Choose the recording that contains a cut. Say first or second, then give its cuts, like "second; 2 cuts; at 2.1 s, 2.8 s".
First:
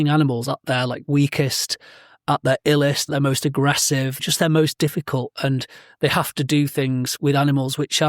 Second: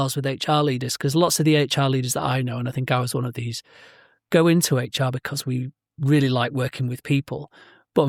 first; 4 cuts; at 2.2 s, 3.0 s, 4.2 s, 7.1 s